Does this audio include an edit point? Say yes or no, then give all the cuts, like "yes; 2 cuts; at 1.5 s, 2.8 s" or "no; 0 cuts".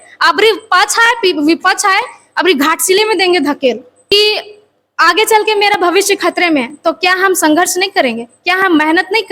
yes; 1 cut; at 3.9 s